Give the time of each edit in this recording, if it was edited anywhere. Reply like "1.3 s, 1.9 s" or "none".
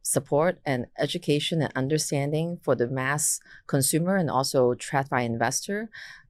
none